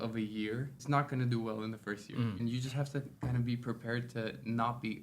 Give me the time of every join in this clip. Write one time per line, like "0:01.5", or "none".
0:00.8
0:02.4